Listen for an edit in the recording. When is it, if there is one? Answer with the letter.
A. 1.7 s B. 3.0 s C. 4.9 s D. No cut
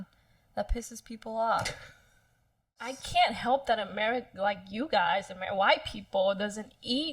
B